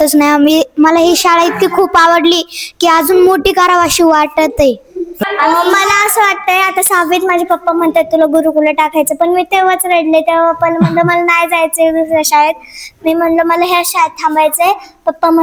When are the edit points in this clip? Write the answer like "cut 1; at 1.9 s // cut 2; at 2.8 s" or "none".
cut 1; at 5.2 s